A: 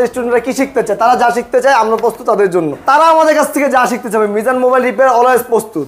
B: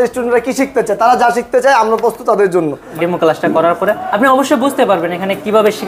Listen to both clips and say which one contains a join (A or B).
B